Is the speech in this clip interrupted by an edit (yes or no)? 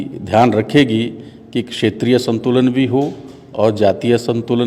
no